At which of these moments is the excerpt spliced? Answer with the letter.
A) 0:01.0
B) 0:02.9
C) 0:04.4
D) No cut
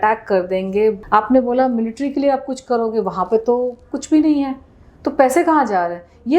A